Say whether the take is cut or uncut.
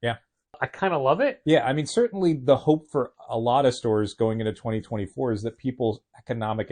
uncut